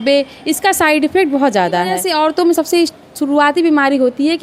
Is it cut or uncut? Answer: cut